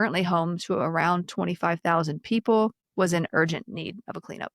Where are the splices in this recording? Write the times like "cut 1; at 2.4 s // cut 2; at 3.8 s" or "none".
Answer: cut 1; at 2.8 s